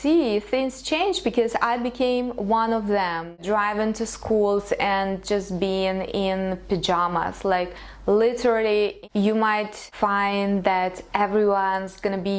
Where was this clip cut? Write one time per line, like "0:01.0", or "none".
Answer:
0:03.4
0:09.0